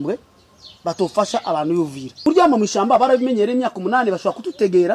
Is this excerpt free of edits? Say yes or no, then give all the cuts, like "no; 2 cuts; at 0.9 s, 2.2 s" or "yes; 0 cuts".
no; 1 cut; at 2.2 s